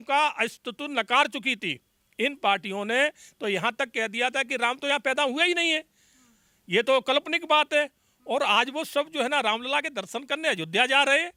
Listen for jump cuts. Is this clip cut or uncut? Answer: uncut